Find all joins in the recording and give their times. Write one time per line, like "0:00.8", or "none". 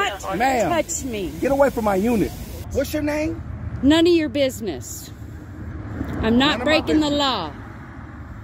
0:02.6